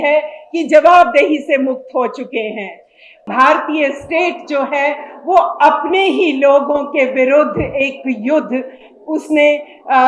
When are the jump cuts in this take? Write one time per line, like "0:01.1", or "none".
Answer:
0:03.3

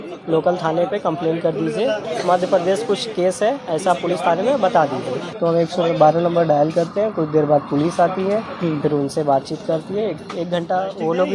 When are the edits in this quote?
0:02.1
0:05.2

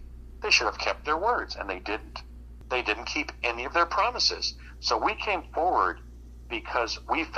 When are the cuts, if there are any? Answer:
0:02.5

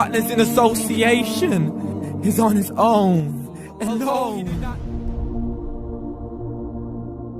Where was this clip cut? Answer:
0:04.4

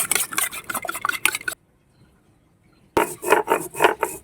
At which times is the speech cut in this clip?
0:01.6

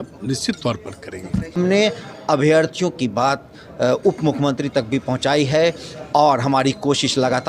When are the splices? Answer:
0:01.6

